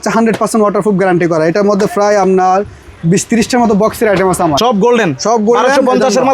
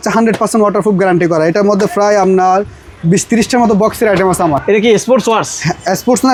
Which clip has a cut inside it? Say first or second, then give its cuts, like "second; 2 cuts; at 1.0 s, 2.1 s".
first; 1 cut; at 4.6 s